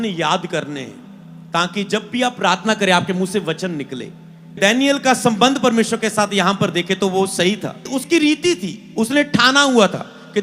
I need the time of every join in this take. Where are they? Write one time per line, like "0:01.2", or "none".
0:04.6
0:07.9